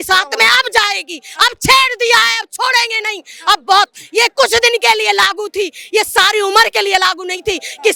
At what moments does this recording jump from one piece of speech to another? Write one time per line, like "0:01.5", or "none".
none